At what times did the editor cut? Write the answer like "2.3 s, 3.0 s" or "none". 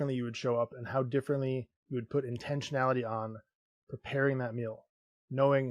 none